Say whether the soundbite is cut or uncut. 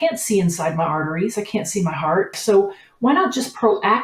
cut